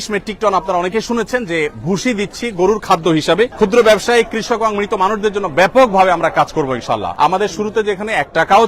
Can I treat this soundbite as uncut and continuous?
no; 2 cuts; at 3.5 s, 7.1 s

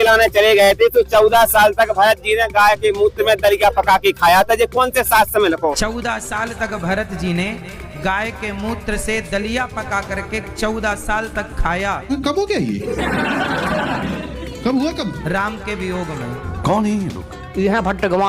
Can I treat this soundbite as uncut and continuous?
yes; 0 cuts

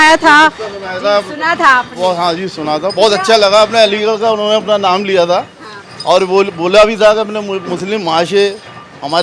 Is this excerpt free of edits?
yes; 0 cuts

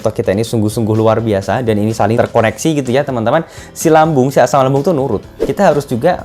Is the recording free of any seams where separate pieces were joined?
no; 2 cuts; at 2.2 s, 5.3 s

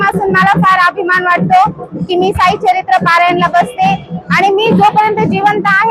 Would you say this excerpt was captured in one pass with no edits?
yes; 0 cuts

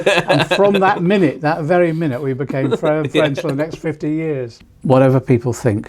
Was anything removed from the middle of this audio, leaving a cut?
yes; 1 cut; at 4.7 s

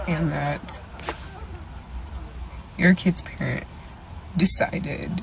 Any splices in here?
no; 0 cuts

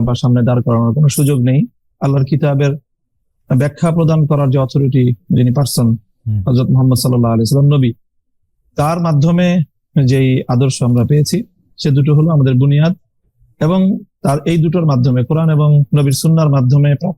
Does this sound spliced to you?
yes; 1 cut; at 1.8 s

